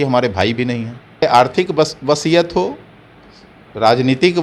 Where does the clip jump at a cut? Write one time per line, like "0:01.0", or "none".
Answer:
0:01.2